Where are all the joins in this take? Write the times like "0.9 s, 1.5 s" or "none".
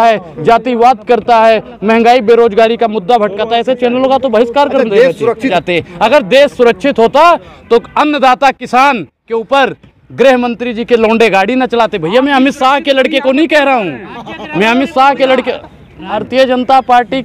5.5 s, 16.2 s